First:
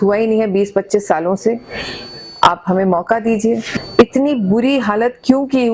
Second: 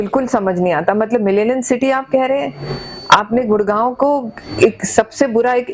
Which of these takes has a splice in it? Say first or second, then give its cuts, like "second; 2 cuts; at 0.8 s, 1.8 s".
first; 1 cut; at 3.7 s